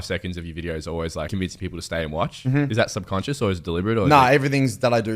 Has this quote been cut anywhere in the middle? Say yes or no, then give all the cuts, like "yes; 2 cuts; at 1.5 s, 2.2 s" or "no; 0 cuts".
yes; 2 cuts; at 1.3 s, 2.7 s